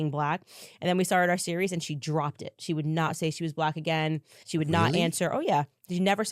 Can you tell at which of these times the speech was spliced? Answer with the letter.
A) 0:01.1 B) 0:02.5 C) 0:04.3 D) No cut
C